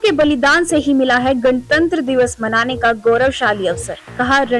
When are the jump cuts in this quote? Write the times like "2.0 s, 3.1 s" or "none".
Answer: none